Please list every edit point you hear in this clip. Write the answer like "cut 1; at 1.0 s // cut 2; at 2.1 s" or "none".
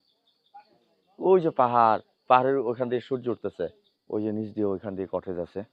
cut 1; at 3.9 s